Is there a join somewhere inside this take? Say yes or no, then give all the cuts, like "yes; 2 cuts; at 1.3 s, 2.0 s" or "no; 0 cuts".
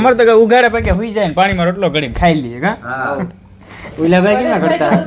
no; 0 cuts